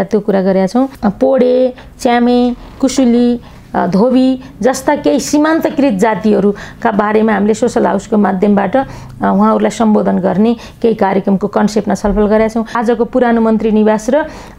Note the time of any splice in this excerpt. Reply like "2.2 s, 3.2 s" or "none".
0.9 s, 12.7 s